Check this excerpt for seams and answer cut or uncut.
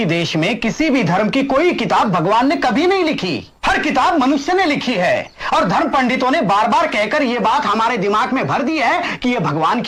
uncut